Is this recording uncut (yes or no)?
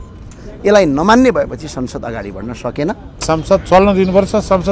no